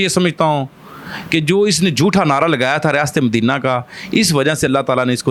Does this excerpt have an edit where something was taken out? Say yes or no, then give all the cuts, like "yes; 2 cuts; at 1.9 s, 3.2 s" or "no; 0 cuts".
no; 0 cuts